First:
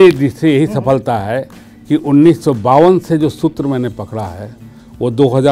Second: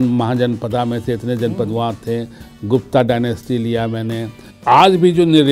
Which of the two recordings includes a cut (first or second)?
second